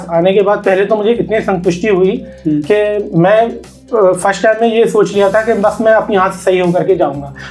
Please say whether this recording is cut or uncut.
uncut